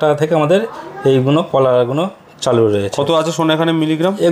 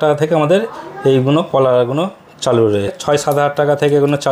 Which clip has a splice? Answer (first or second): second